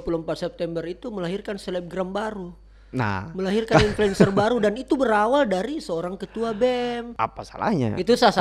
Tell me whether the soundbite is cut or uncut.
cut